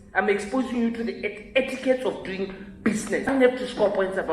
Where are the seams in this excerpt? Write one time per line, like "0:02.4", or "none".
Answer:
0:03.3